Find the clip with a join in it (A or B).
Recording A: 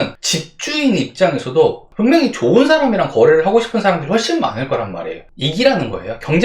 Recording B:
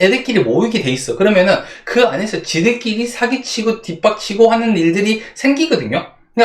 A